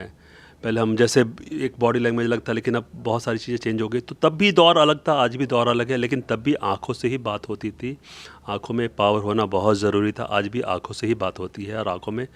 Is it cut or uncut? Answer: uncut